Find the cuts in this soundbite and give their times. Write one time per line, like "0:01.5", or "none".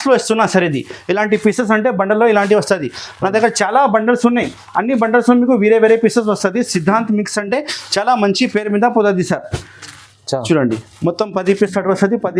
none